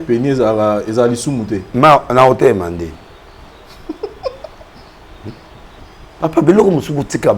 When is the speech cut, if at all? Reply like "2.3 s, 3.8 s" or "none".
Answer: none